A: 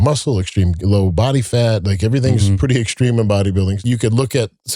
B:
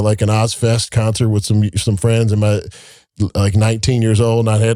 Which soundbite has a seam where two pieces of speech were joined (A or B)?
A